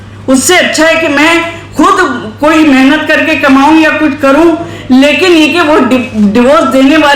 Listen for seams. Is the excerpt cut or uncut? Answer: uncut